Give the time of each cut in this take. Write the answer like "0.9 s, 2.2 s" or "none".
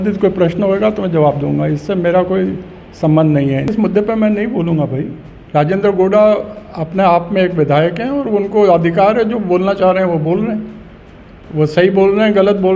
3.7 s